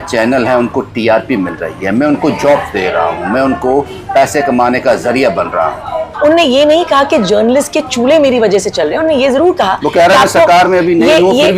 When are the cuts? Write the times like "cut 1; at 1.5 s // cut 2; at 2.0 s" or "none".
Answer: cut 1; at 6.1 s